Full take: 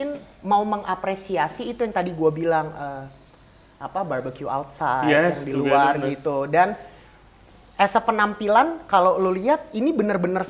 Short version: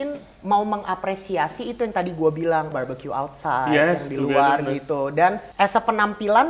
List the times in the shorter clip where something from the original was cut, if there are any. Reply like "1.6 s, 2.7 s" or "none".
2.7 s, 5.4 s

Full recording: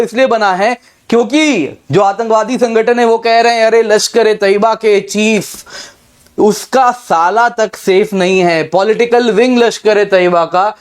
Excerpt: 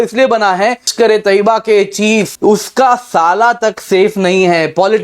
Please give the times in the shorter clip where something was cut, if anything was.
0.9 s, 2.3 s

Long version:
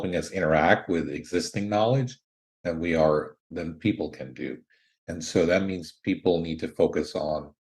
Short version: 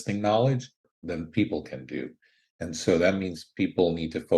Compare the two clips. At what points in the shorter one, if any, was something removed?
1.0 s

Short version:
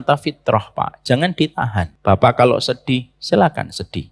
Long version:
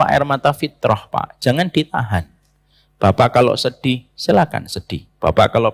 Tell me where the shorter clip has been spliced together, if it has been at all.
1.9 s

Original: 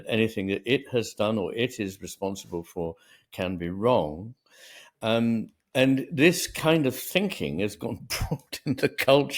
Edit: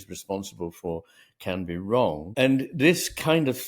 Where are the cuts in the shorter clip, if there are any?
2.2 s

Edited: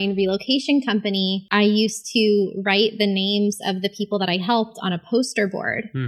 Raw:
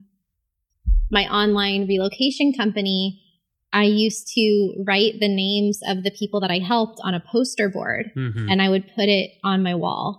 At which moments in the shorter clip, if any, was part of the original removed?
1.4 s

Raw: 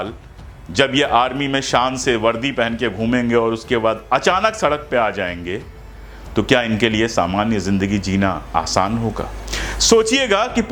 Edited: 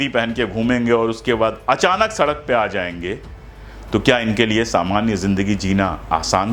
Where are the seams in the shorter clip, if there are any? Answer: none

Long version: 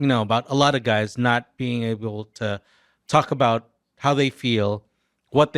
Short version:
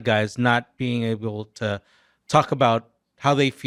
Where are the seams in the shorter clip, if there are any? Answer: none

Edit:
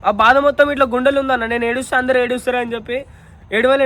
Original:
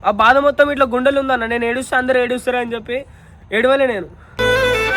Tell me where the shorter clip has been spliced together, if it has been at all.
none

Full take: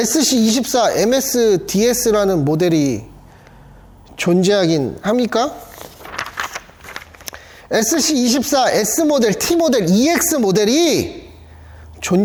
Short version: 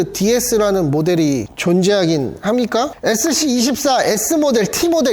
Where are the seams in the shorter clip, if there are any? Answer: 1.5 s, 2.9 s

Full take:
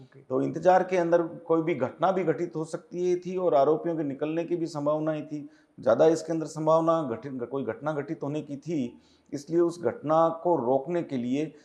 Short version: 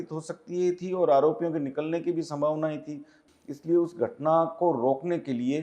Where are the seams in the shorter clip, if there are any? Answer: 3.2 s

